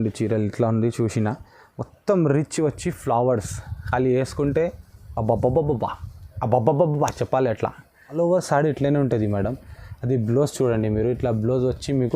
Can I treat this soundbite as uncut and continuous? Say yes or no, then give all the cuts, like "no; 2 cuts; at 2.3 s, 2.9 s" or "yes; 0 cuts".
no; 1 cut; at 8.0 s